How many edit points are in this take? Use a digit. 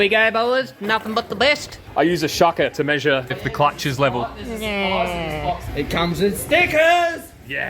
3